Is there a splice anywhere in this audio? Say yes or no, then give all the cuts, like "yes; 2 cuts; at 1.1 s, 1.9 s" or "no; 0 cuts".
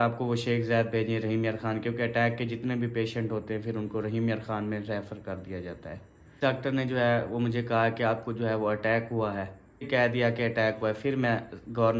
yes; 2 cuts; at 6.4 s, 9.9 s